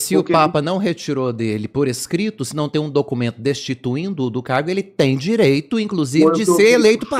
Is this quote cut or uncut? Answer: uncut